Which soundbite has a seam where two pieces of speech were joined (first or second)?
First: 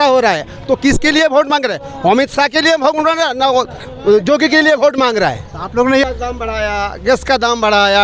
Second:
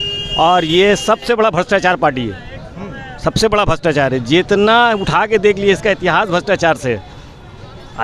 first